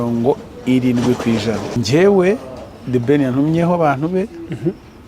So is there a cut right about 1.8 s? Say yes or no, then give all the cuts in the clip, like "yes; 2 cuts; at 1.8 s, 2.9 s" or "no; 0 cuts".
yes; 1 cut; at 1.8 s